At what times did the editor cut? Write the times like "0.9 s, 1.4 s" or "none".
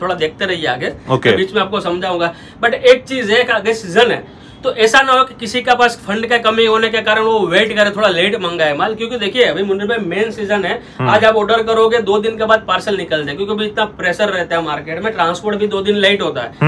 none